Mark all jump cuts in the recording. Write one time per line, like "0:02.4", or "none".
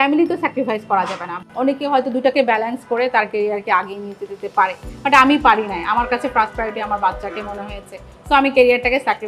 0:01.3